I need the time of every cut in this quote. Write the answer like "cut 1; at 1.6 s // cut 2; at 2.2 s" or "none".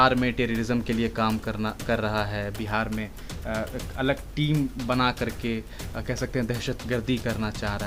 none